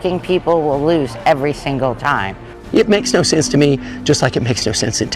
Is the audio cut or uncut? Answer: cut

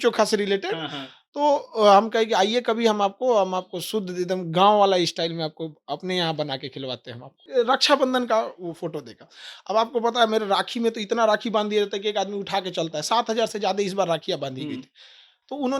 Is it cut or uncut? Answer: cut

